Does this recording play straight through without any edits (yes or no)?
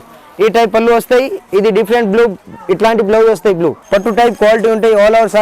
no